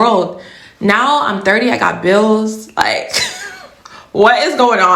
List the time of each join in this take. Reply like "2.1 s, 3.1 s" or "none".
none